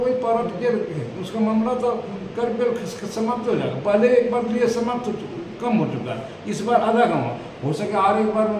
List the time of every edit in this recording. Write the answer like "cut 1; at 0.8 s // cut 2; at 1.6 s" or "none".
none